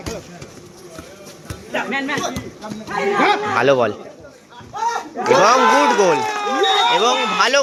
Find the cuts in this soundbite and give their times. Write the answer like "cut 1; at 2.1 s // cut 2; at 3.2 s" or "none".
none